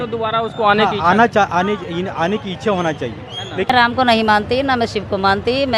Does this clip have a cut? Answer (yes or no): yes